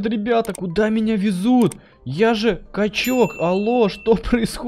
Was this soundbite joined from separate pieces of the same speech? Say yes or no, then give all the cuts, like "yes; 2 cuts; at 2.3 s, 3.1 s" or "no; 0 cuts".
no; 0 cuts